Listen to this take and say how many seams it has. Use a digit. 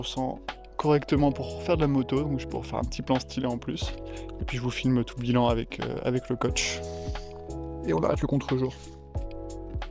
3